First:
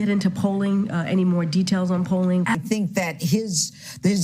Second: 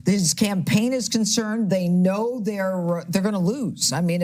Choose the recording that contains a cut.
first; 1 cut; at 2.5 s

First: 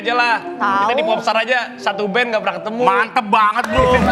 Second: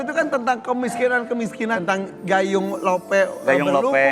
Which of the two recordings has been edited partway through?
second; 1 cut; at 1.8 s

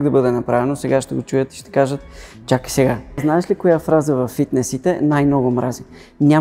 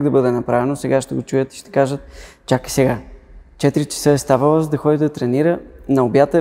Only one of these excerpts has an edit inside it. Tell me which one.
first; 1 cut; at 3.2 s

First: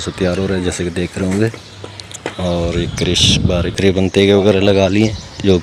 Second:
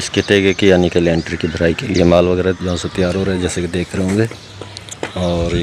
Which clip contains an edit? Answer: first; 1 cut; at 3.8 s

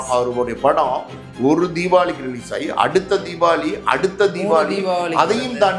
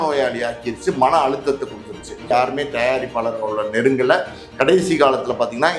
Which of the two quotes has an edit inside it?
second; 1 cut; at 2.3 s

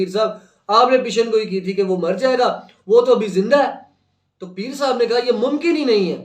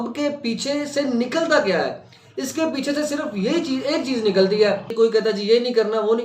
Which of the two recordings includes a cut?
second; 1 cut; at 4.9 s

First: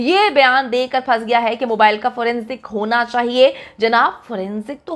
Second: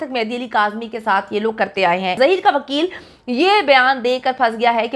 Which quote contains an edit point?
second; 1 cut; at 2.2 s

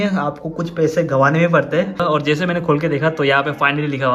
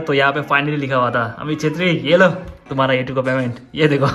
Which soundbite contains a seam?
first; 1 cut; at 2.0 s

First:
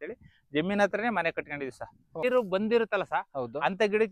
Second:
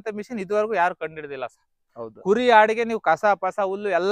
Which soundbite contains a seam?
first; 1 cut; at 2.2 s

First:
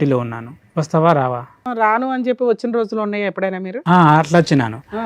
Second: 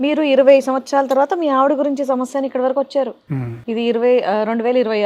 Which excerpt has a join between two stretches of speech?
first; 1 cut; at 1.6 s

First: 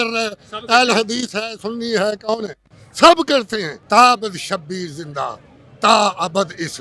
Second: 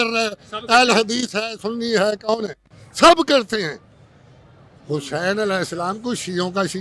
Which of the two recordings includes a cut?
first; 1 cut; at 3.7 s

